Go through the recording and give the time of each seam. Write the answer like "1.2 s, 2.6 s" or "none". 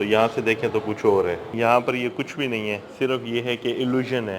1.5 s